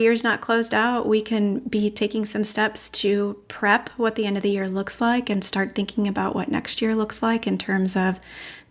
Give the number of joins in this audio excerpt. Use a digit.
0